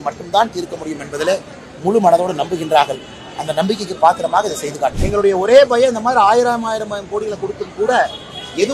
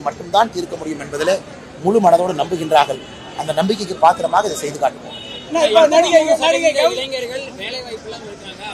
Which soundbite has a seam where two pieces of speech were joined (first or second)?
first